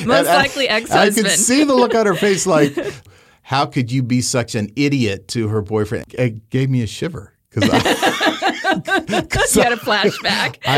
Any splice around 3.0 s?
yes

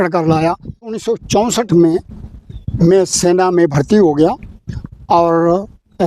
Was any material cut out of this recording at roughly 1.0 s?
yes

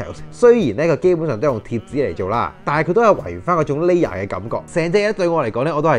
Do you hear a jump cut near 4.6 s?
yes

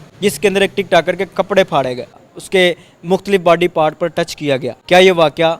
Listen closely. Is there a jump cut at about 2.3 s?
yes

